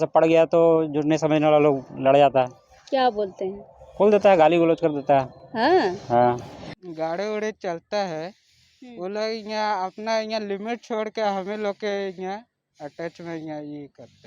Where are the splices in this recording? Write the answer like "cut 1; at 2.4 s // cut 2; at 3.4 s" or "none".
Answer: cut 1; at 6.7 s